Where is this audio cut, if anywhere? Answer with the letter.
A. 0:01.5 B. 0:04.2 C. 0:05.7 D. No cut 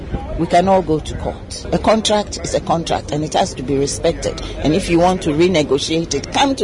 A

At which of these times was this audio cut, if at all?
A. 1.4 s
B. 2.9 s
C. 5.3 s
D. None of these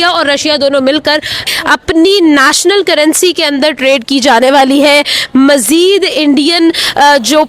A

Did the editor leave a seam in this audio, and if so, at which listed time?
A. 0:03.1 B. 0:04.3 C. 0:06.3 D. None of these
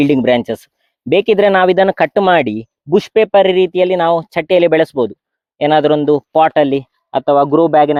D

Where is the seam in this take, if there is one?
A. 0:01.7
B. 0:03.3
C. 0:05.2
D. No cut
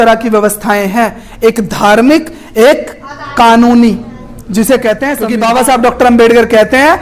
C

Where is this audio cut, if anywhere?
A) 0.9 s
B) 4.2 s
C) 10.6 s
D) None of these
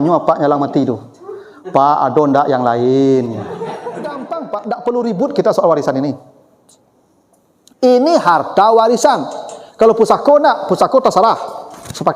B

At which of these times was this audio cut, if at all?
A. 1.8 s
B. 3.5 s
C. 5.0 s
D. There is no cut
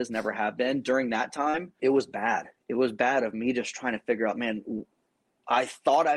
A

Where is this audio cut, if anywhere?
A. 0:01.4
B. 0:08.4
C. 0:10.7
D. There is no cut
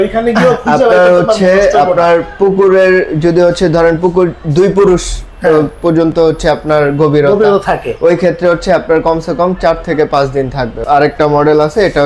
C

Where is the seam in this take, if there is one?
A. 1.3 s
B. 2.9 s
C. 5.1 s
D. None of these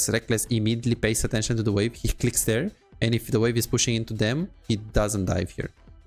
D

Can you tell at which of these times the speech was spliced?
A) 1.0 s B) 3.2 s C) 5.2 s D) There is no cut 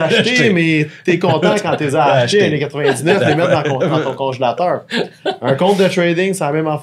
D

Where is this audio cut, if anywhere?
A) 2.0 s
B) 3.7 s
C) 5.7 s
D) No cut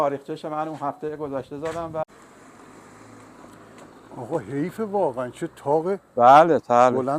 A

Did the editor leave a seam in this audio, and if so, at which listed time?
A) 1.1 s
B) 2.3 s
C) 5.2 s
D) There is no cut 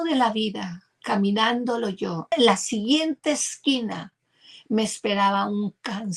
B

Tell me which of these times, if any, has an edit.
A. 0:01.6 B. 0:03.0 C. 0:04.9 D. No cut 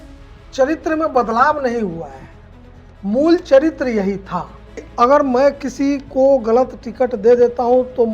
C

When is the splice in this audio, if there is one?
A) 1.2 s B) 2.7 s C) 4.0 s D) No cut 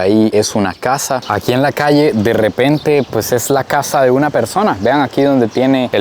A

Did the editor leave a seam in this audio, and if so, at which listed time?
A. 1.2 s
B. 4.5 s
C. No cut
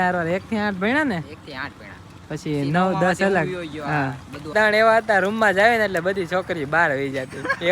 B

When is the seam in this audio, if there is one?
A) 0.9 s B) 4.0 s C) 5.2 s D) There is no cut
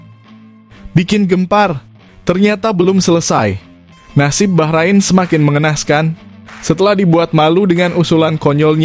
A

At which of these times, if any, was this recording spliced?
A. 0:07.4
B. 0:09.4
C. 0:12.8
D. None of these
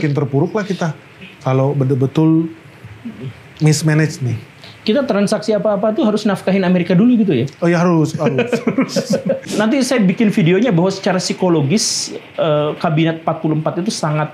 B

